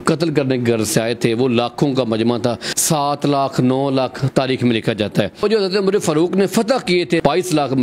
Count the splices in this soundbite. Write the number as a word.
zero